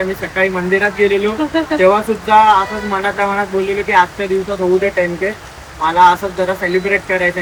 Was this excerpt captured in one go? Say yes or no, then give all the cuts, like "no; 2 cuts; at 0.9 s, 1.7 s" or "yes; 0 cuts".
yes; 0 cuts